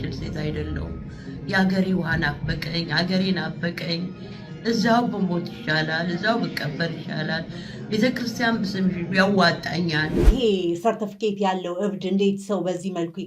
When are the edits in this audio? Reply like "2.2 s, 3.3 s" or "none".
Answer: 10.3 s

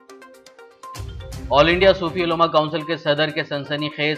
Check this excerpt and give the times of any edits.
1.0 s

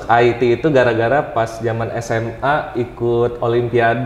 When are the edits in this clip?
none

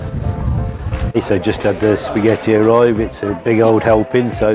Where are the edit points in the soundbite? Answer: 1.1 s

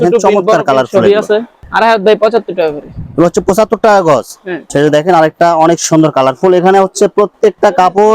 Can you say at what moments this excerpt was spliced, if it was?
1.6 s, 4.6 s

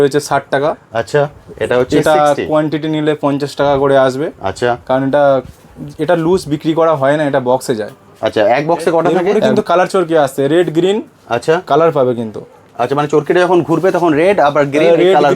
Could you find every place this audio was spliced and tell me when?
9.4 s

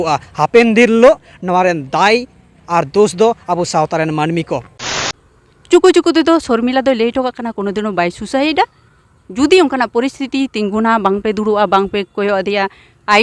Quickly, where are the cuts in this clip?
4.8 s

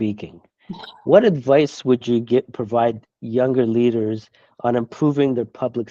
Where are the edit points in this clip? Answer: none

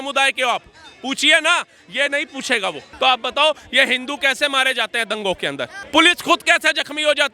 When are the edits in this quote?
2.9 s, 5.8 s

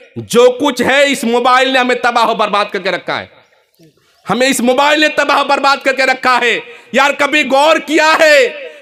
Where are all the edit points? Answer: none

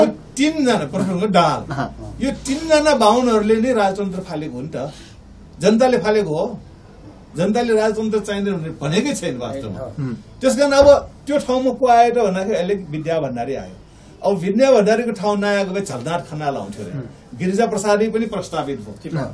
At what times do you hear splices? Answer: none

